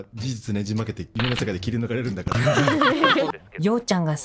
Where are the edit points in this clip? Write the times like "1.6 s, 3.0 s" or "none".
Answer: 1.1 s, 3.3 s